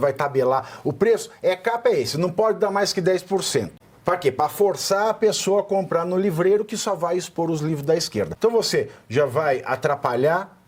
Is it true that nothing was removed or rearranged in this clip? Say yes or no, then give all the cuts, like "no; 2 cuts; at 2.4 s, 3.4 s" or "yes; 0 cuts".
no; 2 cuts; at 3.8 s, 8.3 s